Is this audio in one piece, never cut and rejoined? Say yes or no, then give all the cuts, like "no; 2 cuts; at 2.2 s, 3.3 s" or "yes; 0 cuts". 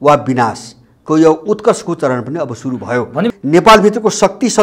no; 1 cut; at 3.3 s